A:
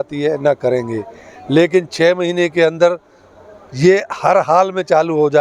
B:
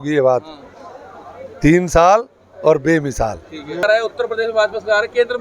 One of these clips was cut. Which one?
B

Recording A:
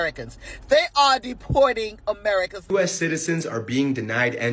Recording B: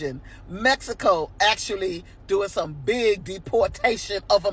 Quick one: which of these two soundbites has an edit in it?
A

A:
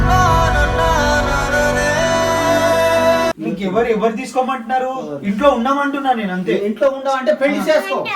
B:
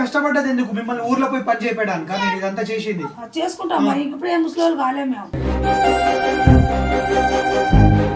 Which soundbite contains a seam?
A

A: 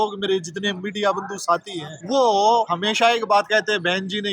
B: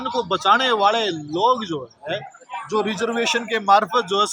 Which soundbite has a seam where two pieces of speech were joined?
A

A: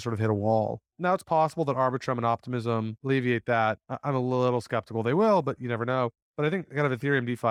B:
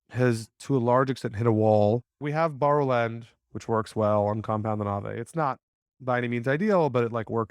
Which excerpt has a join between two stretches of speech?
B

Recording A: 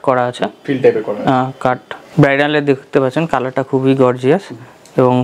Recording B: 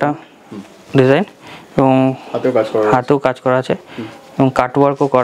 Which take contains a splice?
A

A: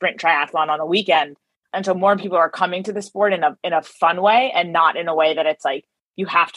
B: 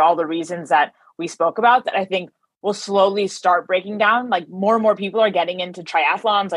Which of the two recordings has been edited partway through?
A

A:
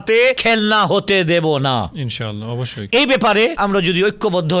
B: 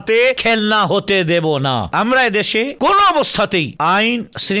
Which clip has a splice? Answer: B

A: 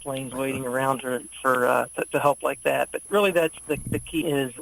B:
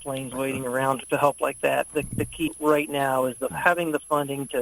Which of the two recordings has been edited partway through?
B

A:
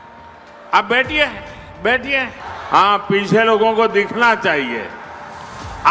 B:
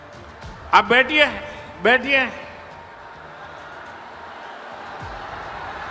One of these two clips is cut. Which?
A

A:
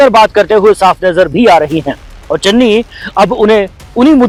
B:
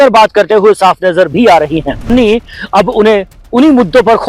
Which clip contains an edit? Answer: B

